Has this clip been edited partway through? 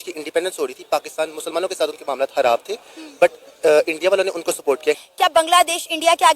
yes; 1 cut; at 5.1 s

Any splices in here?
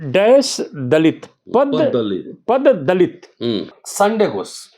yes; 1 cut; at 3.8 s

